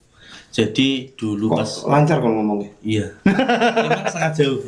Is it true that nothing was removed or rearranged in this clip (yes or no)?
yes